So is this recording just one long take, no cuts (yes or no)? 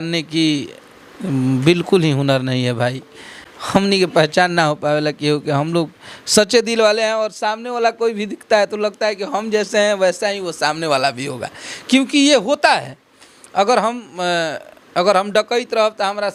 yes